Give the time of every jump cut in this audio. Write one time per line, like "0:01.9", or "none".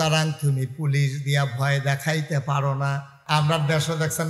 0:03.1